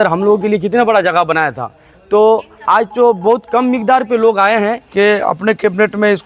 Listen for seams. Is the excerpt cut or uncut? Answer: cut